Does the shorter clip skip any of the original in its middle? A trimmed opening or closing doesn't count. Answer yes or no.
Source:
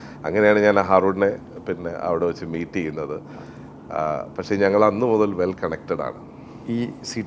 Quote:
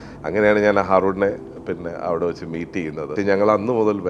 yes